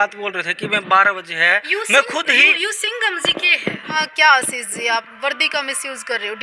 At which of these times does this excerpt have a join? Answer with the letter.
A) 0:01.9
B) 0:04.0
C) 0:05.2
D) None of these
B